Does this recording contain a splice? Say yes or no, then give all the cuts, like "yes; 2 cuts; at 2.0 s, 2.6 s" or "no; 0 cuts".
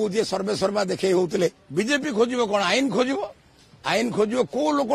yes; 1 cut; at 1.6 s